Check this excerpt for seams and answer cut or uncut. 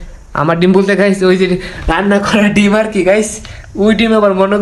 uncut